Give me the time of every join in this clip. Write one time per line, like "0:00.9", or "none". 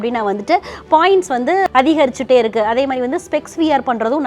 0:01.6